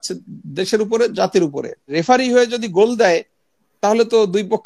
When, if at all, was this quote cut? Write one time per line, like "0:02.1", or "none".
0:01.9